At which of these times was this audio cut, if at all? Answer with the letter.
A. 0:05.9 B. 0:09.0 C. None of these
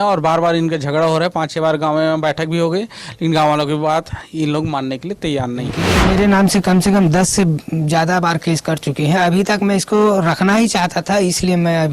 A